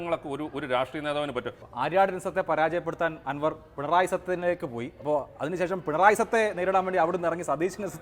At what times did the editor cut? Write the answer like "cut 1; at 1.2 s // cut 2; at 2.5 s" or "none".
cut 1; at 1.6 s